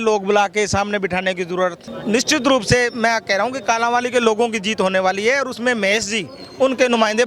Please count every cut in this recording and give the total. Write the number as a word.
one